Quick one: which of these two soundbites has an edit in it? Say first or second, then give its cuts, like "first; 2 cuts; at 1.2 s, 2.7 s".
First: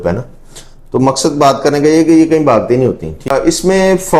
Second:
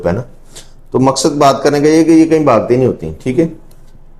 first; 1 cut; at 3.3 s